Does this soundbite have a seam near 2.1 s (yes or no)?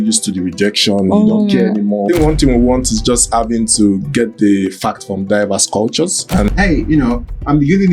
yes